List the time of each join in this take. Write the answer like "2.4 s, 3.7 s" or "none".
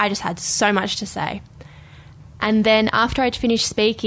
2.1 s